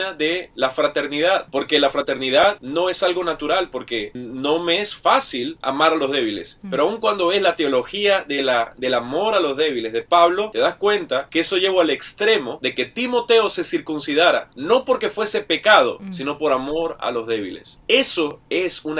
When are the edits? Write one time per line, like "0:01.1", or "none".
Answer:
0:12.6